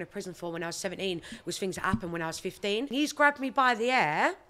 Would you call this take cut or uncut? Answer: cut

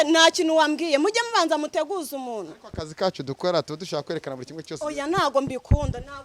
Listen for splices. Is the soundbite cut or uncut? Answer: uncut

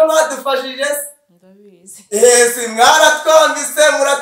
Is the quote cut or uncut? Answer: uncut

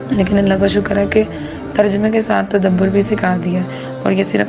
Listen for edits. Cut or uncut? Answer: uncut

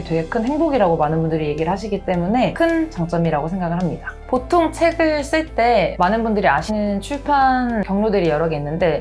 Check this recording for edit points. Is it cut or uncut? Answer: cut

